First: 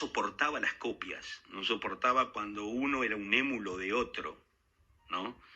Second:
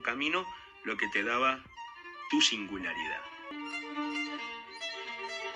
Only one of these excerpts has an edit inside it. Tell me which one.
second; 1 cut; at 3.5 s

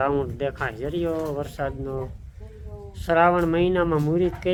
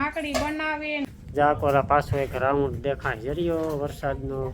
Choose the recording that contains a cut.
second; 1 cut; at 1.1 s

